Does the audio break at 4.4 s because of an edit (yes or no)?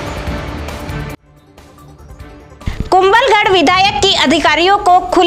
no